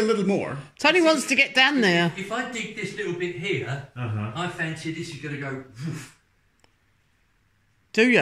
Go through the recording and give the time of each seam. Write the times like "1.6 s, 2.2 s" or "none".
none

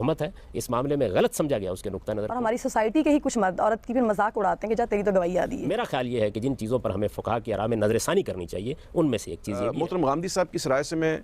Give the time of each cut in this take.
2.3 s, 5.7 s, 9.7 s

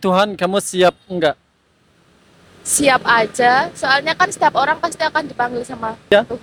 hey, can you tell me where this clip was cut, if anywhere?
none

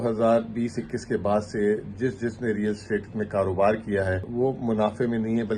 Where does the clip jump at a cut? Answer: 4.3 s

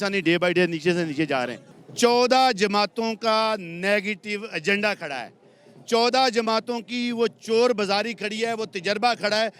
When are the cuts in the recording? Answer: 1.6 s

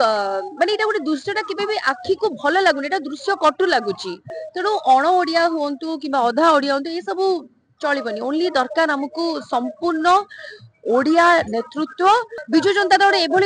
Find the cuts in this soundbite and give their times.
4.3 s, 12.4 s

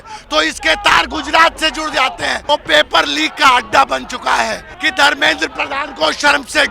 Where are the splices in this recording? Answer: 2.4 s, 4.7 s

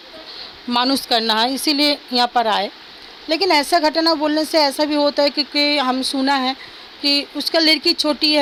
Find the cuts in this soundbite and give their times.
none

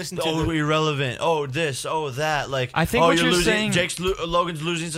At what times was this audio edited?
none

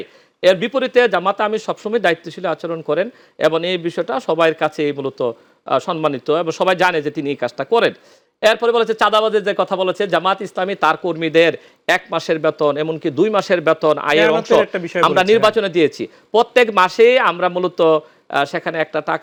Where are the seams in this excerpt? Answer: none

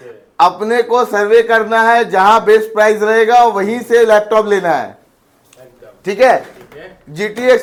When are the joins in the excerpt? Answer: none

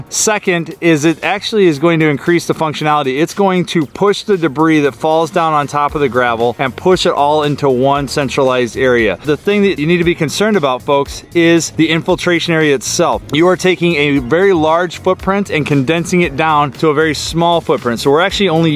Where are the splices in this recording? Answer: none

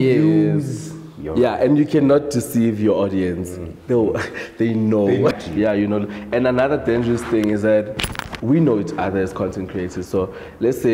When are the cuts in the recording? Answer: 5.3 s

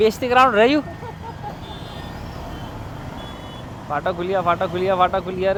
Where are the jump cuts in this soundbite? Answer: none

